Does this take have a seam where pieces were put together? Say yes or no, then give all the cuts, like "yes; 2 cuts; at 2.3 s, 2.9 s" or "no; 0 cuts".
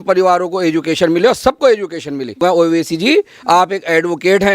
yes; 1 cut; at 2.4 s